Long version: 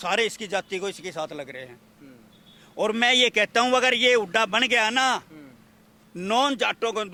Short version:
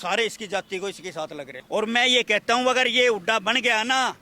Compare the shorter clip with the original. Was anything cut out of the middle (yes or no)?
yes